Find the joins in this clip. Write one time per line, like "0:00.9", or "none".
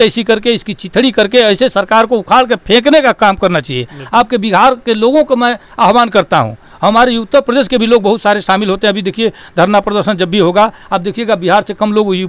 none

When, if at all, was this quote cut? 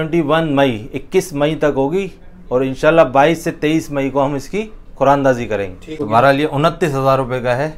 0:05.8

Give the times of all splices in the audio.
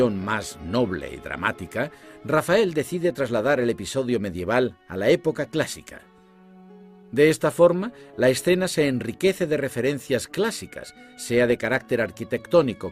0:11.7

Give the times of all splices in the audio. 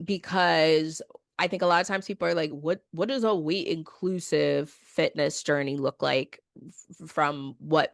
0:01.1

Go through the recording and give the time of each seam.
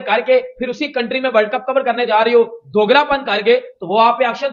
none

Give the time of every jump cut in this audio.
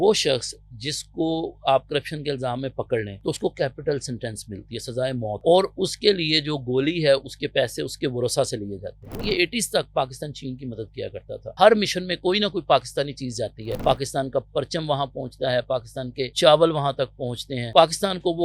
0:03.1
0:05.4
0:09.0
0:11.5
0:13.7
0:16.3
0:17.7

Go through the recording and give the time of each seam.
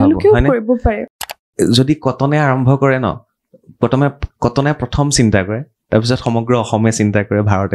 0:01.1

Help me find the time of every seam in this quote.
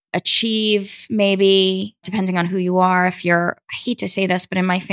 0:02.1
0:03.7

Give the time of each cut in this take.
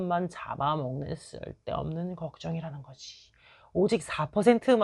none

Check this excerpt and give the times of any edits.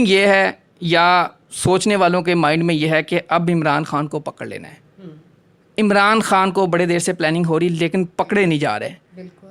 none

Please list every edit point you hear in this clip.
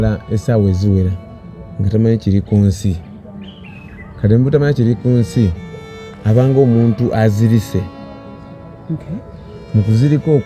none

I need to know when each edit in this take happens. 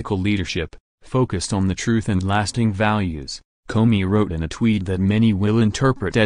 0:02.0

